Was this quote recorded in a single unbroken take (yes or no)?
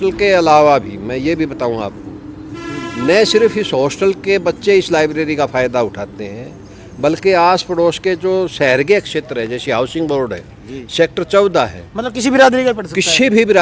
yes